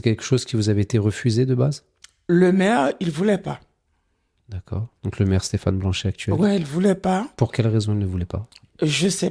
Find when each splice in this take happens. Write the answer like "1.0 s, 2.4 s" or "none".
none